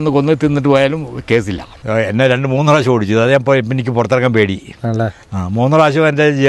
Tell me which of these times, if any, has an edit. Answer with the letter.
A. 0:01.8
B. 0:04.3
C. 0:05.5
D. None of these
A